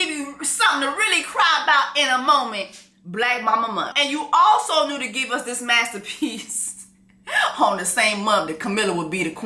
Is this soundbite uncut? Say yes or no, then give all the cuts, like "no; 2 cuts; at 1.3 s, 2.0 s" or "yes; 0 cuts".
no; 1 cut; at 3.9 s